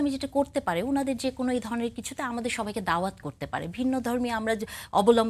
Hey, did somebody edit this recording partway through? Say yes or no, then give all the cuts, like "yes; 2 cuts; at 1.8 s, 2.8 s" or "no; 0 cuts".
no; 0 cuts